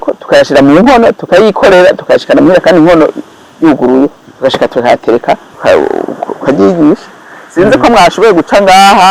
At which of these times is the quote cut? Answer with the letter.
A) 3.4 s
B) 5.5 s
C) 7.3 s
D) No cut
B